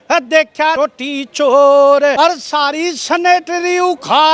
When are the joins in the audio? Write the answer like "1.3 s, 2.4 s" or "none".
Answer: 0.8 s, 2.1 s